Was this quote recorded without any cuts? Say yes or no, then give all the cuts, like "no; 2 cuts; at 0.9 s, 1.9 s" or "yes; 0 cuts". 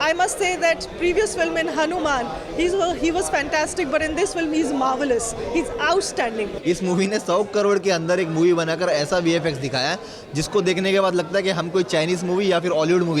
no; 1 cut; at 6.5 s